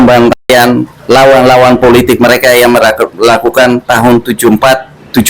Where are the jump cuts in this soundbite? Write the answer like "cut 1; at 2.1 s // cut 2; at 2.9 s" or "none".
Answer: cut 1; at 0.9 s